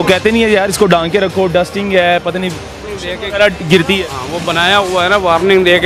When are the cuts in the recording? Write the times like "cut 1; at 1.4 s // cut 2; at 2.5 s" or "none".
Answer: none